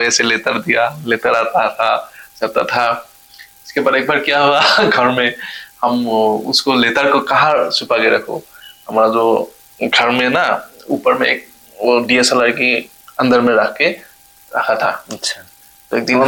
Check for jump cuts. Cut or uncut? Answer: uncut